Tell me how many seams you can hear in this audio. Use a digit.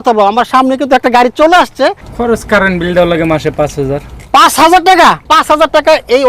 2